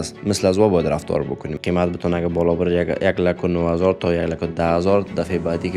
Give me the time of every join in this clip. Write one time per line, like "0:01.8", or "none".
0:01.6